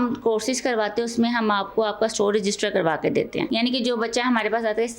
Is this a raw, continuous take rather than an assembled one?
no; 1 cut; at 3.5 s

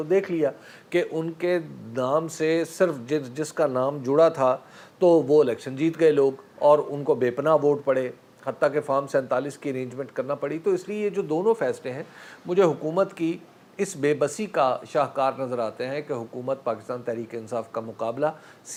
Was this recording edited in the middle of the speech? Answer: no; 0 cuts

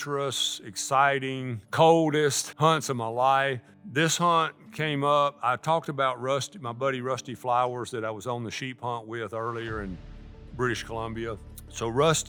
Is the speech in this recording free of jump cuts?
yes; 0 cuts

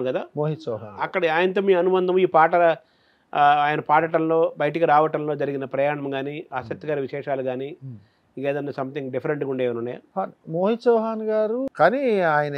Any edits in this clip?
yes; 2 cuts; at 10.0 s, 11.7 s

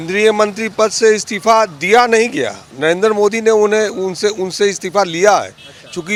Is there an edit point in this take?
no; 0 cuts

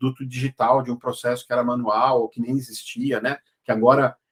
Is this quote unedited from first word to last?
yes; 0 cuts

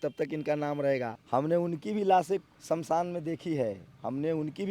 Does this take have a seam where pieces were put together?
yes; 2 cuts; at 1.2 s, 2.5 s

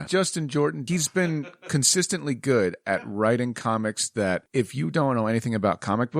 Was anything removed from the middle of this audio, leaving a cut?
yes; 1 cut; at 4.5 s

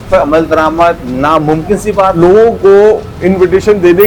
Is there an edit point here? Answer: yes; 2 cuts; at 1.1 s, 2.1 s

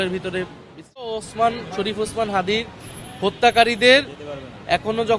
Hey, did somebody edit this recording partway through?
yes; 1 cut; at 1.1 s

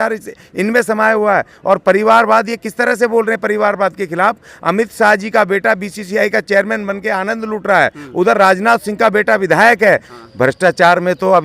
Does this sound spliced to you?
yes; 1 cut; at 10.1 s

